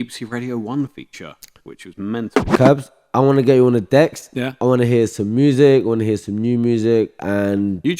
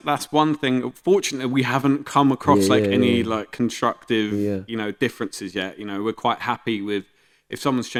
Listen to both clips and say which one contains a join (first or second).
first